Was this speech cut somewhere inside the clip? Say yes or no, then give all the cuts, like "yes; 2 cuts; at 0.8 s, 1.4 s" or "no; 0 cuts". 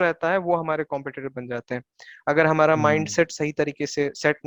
no; 0 cuts